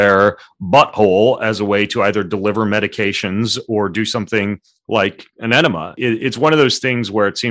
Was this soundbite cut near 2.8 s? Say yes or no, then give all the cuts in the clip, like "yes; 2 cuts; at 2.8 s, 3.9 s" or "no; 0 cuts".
no; 1 cut; at 5.9 s